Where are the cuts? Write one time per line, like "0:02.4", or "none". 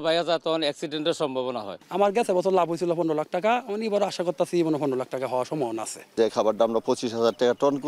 0:01.7
0:06.0